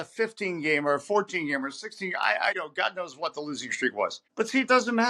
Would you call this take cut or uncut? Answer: cut